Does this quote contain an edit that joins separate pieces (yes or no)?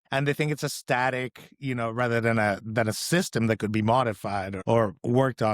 yes